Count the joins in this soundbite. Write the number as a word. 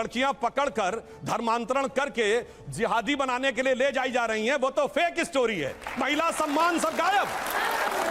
one